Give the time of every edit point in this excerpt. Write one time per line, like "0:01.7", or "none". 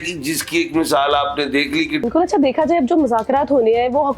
0:02.1